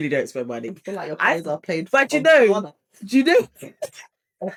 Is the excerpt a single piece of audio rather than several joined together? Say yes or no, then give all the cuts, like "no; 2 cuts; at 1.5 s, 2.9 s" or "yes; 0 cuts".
yes; 0 cuts